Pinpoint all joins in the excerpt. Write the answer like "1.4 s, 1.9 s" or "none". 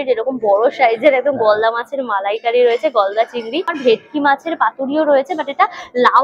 3.8 s